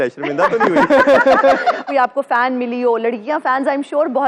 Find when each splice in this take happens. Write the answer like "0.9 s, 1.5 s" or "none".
1.8 s